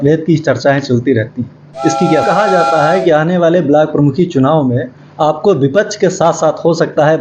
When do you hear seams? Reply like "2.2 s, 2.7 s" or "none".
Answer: 2.2 s